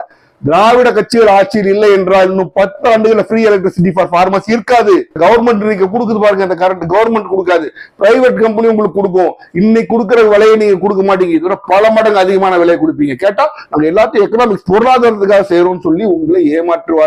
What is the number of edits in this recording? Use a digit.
0